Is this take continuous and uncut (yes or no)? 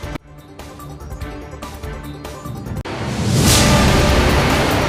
yes